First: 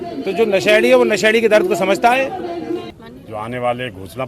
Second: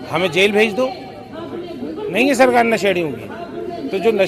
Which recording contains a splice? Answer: first; 1 cut; at 2.8 s

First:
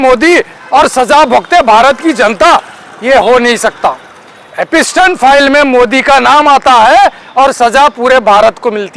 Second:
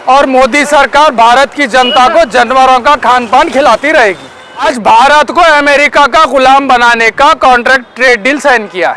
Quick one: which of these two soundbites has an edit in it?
second; 1 cut; at 4.7 s

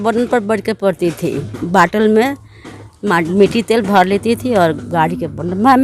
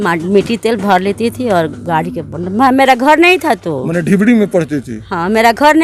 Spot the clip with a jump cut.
first; 1 cut; at 1.5 s

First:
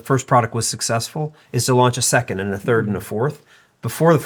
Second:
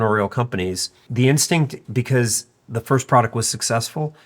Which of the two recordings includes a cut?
second; 1 cut; at 1.0 s

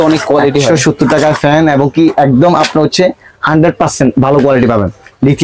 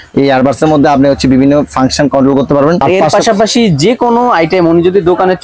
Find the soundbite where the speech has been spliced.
second; 1 cut; at 2.8 s

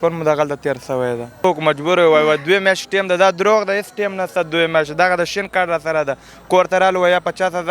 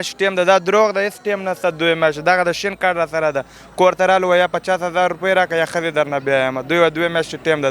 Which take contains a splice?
first; 1 cut; at 1.4 s

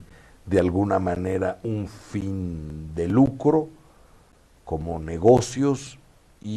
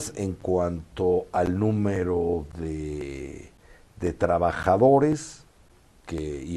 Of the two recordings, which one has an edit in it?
second; 1 cut; at 1.9 s

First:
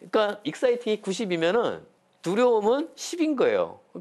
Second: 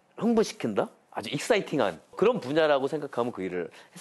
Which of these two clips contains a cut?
second; 1 cut; at 2.1 s

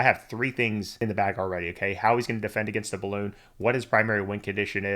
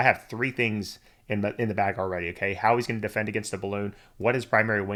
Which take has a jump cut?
first; 1 cut; at 1.0 s

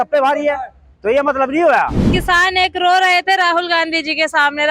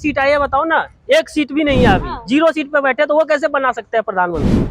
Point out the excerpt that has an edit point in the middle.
first; 1 cut; at 2.1 s

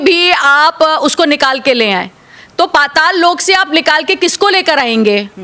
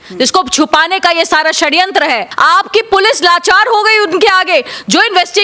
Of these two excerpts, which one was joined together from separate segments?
second; 1 cut; at 2.3 s

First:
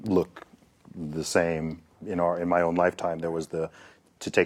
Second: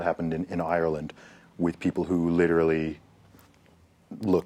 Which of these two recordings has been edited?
first; 1 cut; at 2.0 s

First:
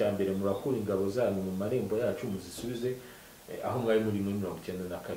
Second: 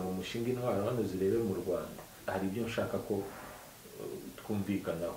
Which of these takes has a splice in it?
second; 1 cut; at 2.1 s

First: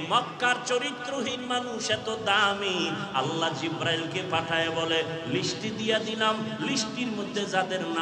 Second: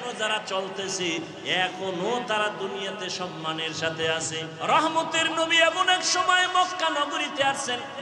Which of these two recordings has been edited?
second; 1 cut; at 4.5 s

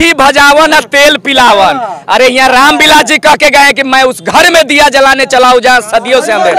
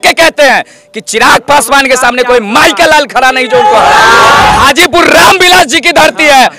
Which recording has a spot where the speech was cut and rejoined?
second; 1 cut; at 4.6 s

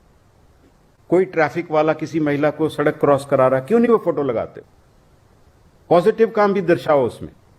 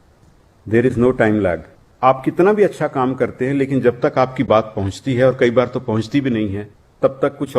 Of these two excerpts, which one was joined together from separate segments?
second; 1 cut; at 1.8 s

